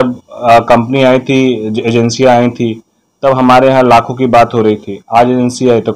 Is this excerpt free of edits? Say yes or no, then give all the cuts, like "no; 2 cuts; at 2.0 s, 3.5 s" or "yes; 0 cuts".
yes; 0 cuts